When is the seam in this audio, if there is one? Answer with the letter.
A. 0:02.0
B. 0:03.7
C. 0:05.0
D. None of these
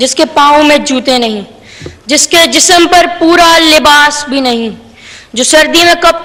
D